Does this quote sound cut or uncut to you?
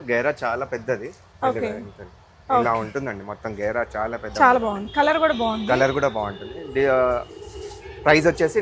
uncut